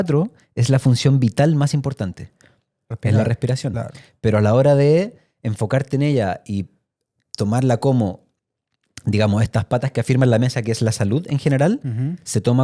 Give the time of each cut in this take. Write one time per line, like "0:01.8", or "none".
none